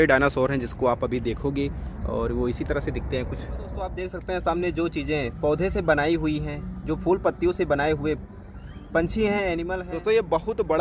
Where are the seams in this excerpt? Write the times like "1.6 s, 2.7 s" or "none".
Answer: 3.9 s, 9.8 s